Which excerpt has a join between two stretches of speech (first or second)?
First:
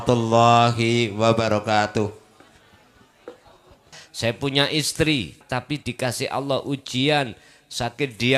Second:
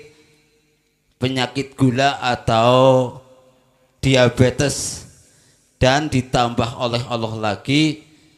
first